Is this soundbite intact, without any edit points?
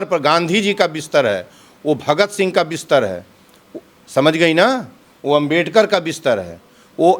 yes; 0 cuts

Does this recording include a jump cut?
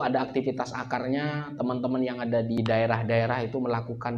yes; 1 cut; at 2.6 s

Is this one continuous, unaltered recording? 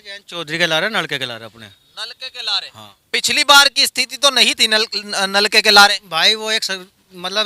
yes; 0 cuts

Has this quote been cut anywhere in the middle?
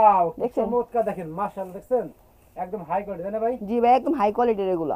no; 0 cuts

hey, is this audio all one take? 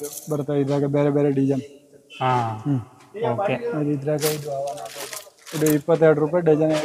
yes; 0 cuts

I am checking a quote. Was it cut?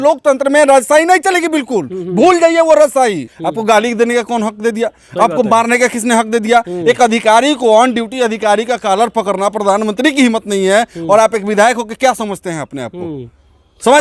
yes; 1 cut; at 3.3 s

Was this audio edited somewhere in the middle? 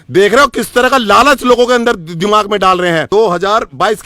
yes; 1 cut; at 3.1 s

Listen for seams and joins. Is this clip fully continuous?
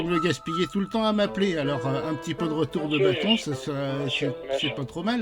yes; 0 cuts

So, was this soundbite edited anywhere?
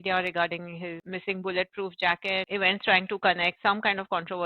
yes; 3 cuts; at 1.0 s, 2.5 s, 3.5 s

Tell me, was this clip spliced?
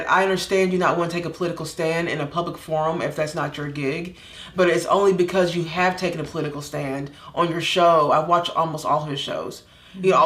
yes; 1 cut; at 4.3 s

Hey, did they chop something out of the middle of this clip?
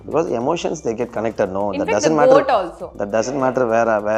no; 0 cuts

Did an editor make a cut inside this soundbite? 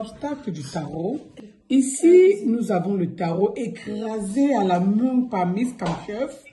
yes; 1 cut; at 1.3 s

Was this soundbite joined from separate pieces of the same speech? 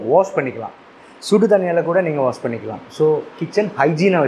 yes; 1 cut; at 3.3 s

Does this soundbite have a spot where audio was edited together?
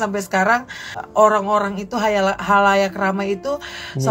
yes; 1 cut; at 1.0 s

